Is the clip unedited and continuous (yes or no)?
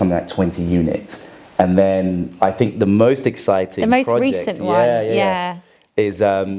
yes